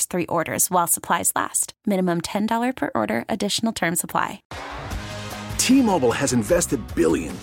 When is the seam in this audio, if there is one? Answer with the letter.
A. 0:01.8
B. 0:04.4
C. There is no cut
B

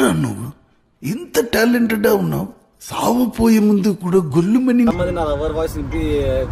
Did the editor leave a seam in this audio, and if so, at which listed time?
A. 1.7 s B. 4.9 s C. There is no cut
B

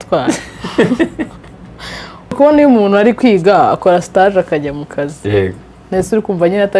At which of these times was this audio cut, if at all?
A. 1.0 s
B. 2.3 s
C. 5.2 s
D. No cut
B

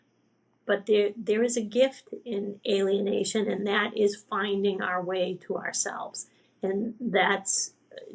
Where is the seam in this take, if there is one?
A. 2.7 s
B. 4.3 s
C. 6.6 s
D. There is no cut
D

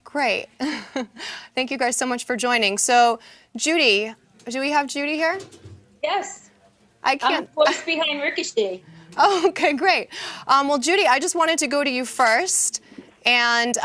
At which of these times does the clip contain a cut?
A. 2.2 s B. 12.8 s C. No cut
A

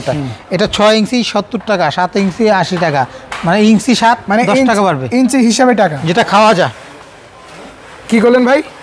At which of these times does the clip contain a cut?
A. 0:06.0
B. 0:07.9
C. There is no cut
A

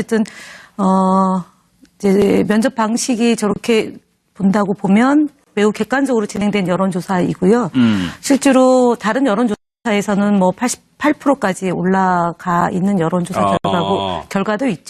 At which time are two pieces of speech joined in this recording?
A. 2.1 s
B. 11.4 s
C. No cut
B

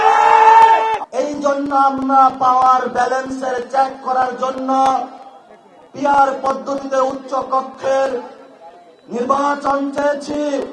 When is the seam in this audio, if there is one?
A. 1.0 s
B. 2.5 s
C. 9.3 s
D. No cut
A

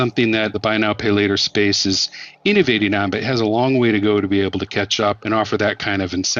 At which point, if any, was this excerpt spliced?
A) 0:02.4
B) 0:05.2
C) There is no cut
B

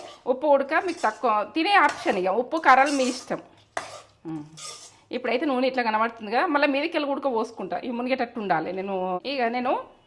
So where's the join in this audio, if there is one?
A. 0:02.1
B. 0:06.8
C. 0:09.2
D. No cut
C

